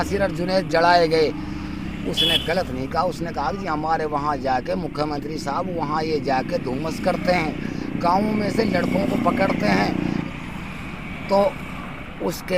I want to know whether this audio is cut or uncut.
uncut